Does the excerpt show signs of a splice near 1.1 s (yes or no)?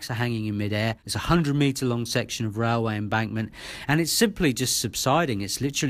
yes